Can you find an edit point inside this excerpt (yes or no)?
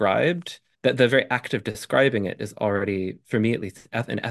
no